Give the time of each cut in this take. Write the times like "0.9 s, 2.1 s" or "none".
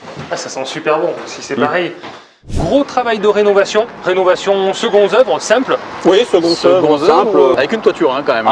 2.5 s, 4.0 s, 7.5 s